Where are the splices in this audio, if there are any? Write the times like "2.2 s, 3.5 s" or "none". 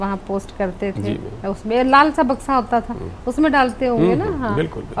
none